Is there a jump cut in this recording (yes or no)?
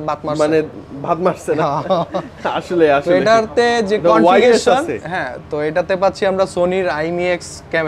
no